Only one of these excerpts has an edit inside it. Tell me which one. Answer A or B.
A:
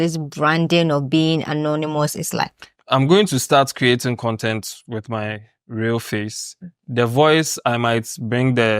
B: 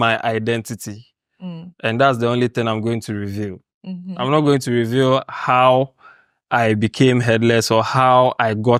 A